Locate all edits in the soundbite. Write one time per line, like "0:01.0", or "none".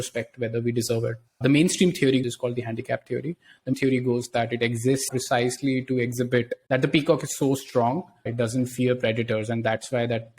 0:01.3
0:02.2
0:03.7
0:06.6
0:08.2